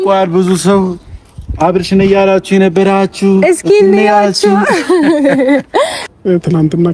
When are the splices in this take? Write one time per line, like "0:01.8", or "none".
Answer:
0:06.0